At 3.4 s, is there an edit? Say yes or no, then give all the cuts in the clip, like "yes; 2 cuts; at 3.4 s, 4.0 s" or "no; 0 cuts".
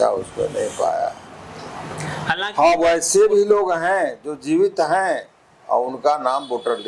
no; 0 cuts